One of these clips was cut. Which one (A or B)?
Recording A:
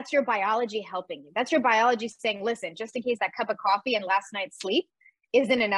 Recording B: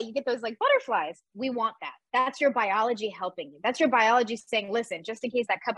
B